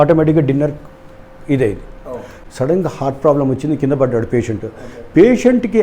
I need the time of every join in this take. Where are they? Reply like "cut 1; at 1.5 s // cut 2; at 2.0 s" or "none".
cut 1; at 2.3 s